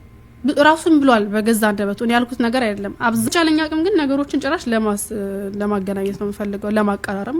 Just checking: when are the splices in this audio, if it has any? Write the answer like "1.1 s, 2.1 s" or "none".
3.3 s

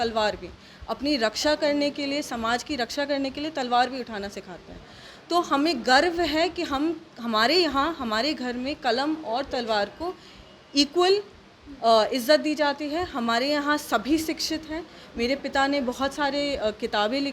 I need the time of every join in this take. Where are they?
none

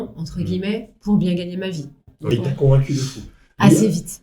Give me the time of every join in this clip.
2.2 s

